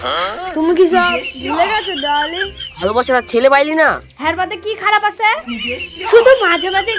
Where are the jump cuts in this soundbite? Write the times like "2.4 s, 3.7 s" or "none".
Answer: 2.5 s, 4.1 s, 5.9 s